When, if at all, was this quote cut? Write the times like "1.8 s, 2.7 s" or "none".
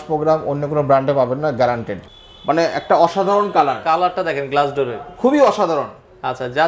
2.0 s